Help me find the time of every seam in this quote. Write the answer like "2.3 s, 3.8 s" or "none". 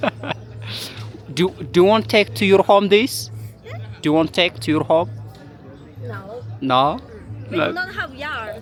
none